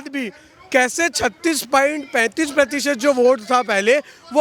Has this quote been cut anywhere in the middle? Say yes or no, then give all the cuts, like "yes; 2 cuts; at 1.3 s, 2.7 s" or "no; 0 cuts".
no; 0 cuts